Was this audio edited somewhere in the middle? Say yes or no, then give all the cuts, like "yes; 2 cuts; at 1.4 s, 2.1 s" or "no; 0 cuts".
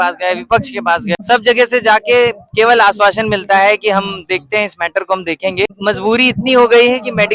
yes; 2 cuts; at 1.2 s, 5.7 s